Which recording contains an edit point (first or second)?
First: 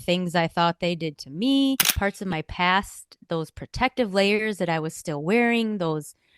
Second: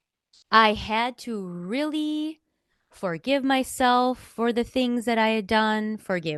first